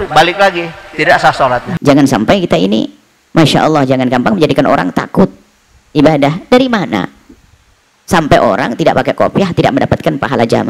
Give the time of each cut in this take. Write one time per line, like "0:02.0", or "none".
0:01.7